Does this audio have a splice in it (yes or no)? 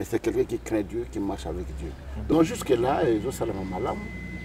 yes